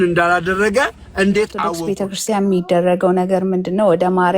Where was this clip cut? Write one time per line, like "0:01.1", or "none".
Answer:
0:01.8